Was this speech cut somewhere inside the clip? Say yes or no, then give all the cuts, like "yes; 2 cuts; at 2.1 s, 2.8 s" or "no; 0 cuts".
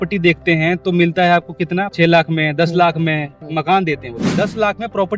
yes; 2 cuts; at 1.9 s, 4.2 s